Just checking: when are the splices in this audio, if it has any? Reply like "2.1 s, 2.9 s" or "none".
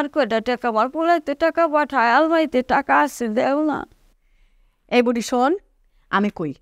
none